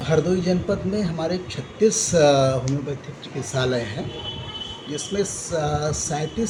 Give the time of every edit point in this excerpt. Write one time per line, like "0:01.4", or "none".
none